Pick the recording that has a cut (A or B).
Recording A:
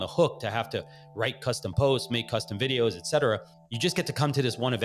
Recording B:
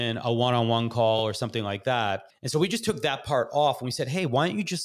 B